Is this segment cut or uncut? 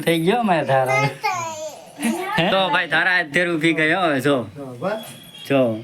cut